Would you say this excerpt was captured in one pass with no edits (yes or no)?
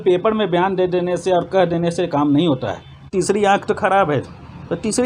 no